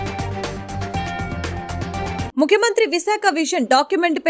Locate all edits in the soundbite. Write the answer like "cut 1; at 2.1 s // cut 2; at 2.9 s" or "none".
cut 1; at 2.3 s